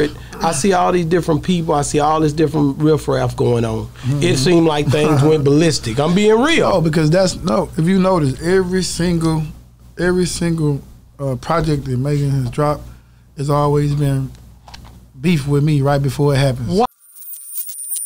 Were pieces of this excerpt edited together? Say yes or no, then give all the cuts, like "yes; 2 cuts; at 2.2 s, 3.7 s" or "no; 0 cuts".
yes; 1 cut; at 16.9 s